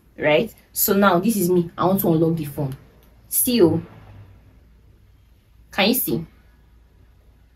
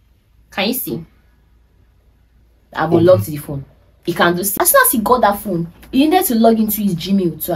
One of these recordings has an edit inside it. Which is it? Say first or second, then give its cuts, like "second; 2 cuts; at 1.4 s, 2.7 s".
second; 1 cut; at 4.5 s